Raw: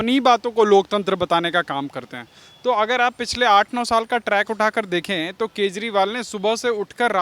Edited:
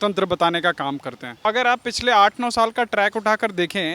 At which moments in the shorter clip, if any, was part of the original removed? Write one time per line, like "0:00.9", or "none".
0:01.4